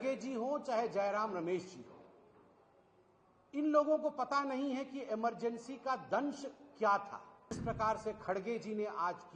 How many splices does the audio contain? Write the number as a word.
one